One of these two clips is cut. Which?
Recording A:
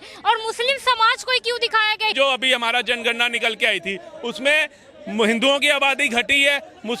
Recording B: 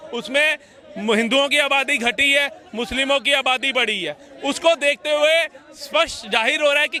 A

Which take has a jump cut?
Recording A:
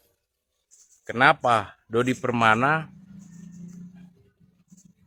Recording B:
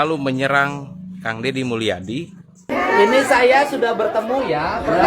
B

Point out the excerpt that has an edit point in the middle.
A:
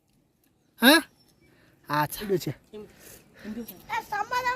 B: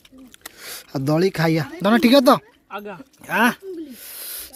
A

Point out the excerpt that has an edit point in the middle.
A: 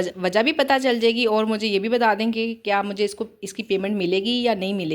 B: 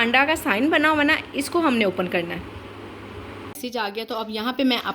B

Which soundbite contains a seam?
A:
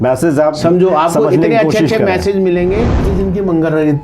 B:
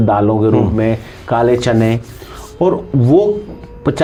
A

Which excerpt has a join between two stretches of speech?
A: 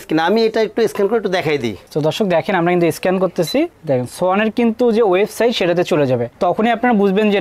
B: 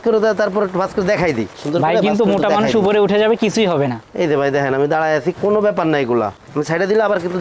B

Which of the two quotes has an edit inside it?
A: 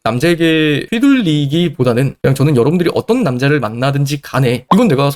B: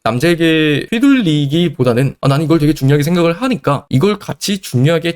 B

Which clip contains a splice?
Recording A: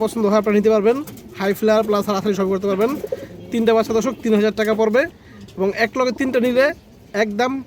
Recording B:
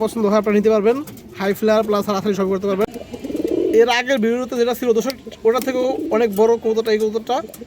B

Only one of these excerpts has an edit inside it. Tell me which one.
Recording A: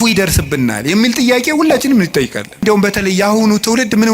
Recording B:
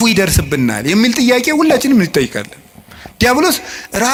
A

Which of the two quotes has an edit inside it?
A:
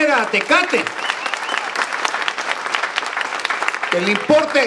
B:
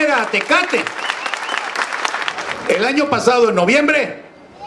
B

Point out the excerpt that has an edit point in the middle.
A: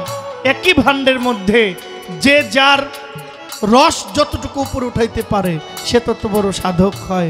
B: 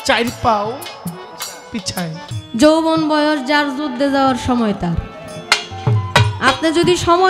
B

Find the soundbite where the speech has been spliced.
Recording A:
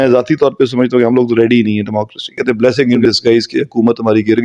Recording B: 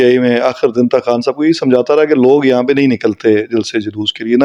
A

